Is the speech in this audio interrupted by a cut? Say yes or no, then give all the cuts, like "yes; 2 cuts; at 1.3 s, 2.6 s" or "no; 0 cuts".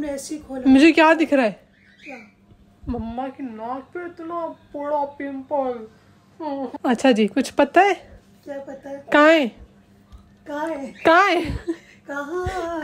yes; 1 cut; at 6.7 s